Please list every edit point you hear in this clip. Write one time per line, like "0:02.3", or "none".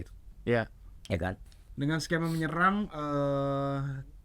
0:01.4